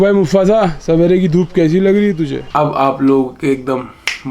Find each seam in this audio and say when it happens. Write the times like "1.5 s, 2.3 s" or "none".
2.4 s

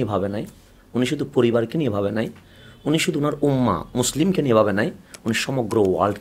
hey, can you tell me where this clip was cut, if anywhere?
none

